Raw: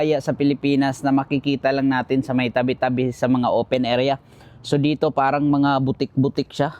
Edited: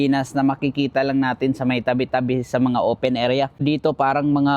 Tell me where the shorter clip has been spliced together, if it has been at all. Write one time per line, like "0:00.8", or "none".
0:03.6